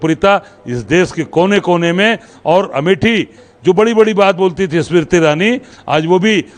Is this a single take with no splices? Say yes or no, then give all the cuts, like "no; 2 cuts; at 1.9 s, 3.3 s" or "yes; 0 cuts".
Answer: no; 1 cut; at 3.4 s